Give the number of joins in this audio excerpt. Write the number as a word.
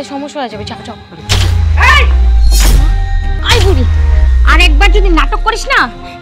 one